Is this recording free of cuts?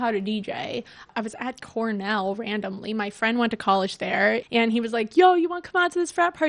no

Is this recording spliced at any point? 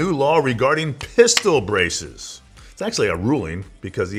no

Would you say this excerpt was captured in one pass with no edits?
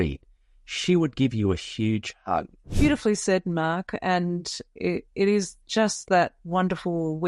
no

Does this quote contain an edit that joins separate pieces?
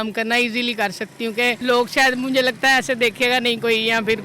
yes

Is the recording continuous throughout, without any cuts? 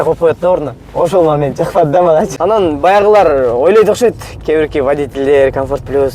no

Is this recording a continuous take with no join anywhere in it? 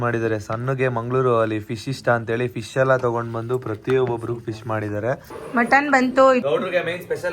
no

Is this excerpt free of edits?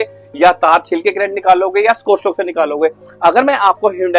yes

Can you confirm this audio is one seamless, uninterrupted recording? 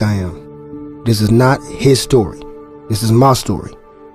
no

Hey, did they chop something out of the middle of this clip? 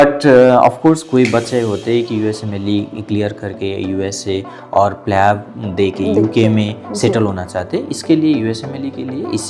no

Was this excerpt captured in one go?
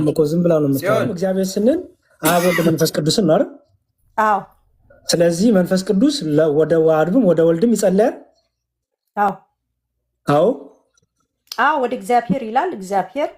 no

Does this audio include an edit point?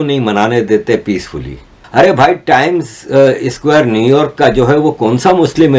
yes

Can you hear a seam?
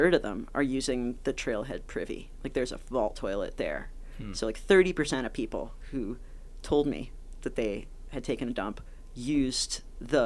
no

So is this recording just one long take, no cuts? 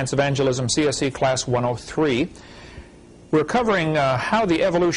yes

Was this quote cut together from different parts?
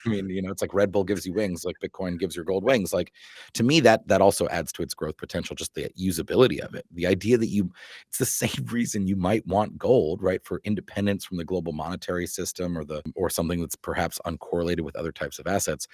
yes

